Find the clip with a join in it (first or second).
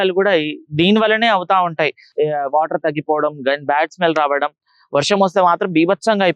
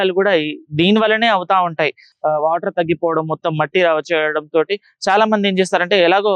first